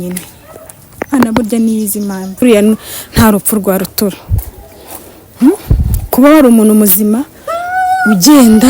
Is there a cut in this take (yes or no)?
yes